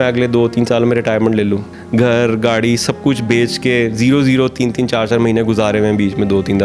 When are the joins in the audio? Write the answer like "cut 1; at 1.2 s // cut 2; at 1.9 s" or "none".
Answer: cut 1; at 1.7 s